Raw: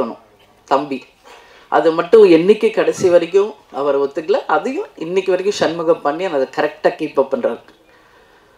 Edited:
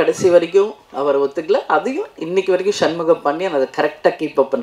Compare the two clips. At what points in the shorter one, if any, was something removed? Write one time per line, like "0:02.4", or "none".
none